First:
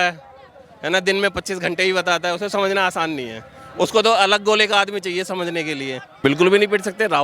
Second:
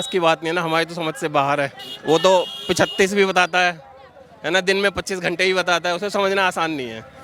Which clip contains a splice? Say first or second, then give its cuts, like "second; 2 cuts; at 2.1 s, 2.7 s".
first; 1 cut; at 6.1 s